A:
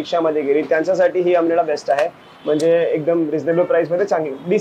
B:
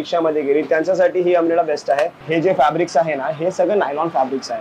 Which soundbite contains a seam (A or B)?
B